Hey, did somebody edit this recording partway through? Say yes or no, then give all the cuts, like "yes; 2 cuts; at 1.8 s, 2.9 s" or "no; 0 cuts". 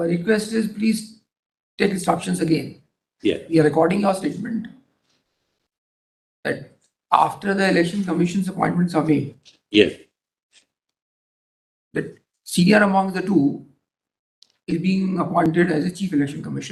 no; 0 cuts